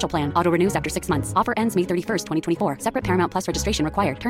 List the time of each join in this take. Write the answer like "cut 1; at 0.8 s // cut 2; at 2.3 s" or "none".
none